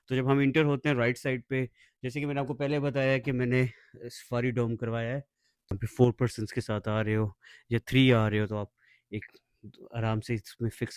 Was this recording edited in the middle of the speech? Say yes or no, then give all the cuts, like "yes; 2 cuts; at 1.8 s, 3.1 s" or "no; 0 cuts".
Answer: yes; 1 cut; at 5.7 s